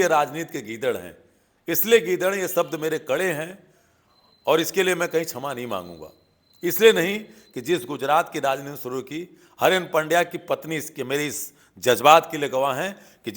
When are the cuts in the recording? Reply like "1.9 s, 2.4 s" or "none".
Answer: none